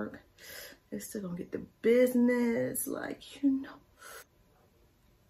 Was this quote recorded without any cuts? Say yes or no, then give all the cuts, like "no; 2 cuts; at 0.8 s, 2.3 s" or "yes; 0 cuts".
no; 1 cut; at 4.2 s